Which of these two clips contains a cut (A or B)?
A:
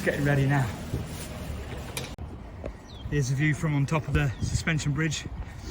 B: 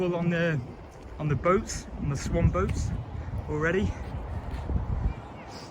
A